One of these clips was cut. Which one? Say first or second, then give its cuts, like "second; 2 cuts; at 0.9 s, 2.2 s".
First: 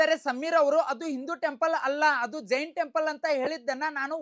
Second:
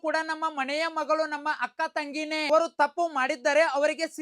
second; 1 cut; at 2.5 s